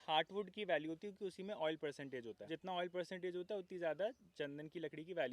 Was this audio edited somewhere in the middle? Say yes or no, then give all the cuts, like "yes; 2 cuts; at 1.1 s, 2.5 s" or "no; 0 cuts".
yes; 1 cut; at 2.4 s